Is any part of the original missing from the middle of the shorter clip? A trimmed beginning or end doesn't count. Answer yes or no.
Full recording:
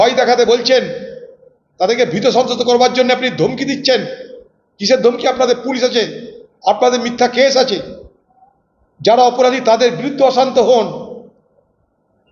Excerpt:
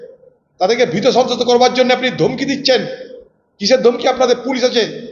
no